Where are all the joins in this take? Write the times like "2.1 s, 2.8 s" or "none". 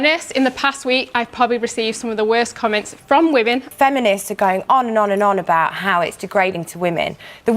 3.7 s